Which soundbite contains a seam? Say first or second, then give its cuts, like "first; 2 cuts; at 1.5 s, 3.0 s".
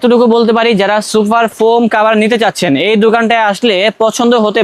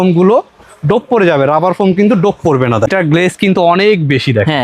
second; 1 cut; at 2.9 s